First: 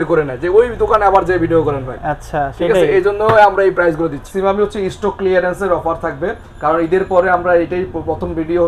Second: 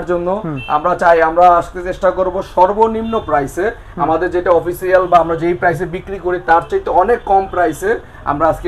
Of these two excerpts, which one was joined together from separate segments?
first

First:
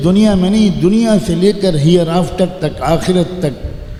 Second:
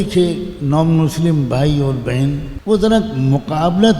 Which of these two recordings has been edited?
second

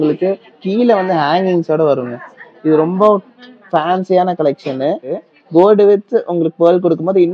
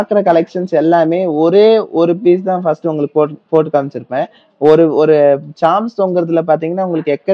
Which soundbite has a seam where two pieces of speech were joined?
first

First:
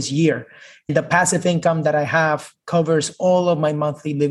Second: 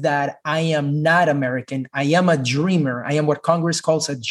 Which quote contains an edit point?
first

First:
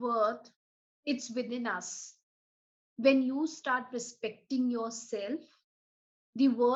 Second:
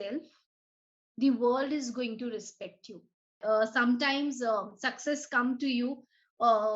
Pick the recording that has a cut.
second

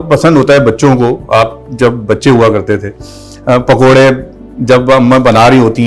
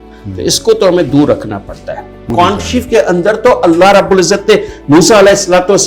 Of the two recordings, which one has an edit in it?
second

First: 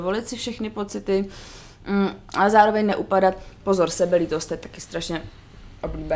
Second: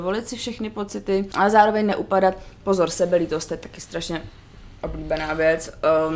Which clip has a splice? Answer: second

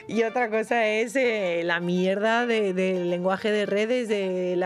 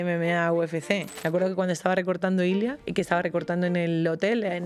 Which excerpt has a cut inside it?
second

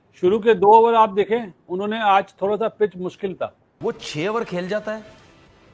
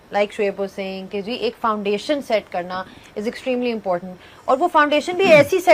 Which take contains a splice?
first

